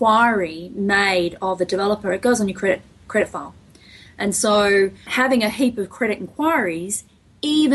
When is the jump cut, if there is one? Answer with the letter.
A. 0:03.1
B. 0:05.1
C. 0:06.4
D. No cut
B